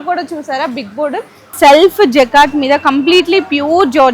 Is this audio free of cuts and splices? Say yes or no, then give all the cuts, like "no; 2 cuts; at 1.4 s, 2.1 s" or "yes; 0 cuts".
no; 1 cut; at 1.5 s